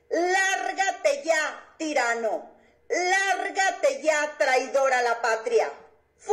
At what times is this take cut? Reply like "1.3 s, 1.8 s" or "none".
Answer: none